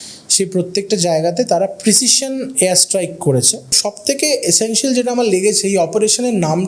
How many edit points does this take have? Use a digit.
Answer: 1